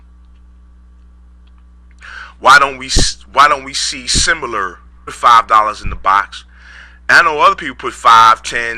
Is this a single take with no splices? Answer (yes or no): yes